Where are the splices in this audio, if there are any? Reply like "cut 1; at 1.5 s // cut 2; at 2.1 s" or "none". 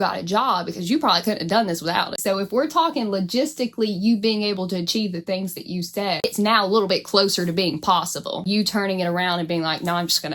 cut 1; at 2.1 s // cut 2; at 6.2 s // cut 3; at 8.4 s